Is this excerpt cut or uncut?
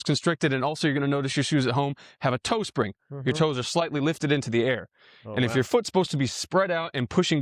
uncut